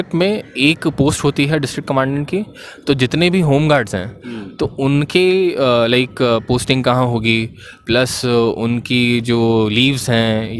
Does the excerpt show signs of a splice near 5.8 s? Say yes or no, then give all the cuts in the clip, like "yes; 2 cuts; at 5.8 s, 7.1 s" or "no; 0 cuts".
no; 0 cuts